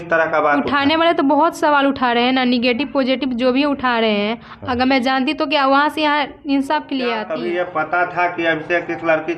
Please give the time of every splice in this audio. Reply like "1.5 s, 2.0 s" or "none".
7.3 s